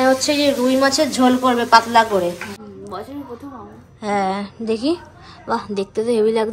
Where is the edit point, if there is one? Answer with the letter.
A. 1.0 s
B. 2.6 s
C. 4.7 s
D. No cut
B